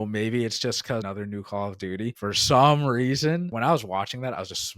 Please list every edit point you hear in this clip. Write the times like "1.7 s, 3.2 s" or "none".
1.0 s, 2.2 s, 3.5 s